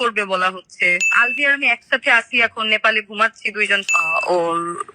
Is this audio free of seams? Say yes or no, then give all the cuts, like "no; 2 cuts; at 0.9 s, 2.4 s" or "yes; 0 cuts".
no; 2 cuts; at 1.1 s, 3.8 s